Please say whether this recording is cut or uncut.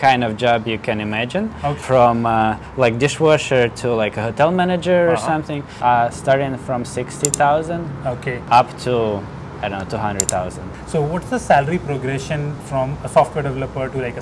cut